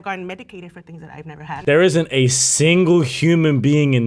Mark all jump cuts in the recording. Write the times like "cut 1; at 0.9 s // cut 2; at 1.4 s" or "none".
cut 1; at 1.6 s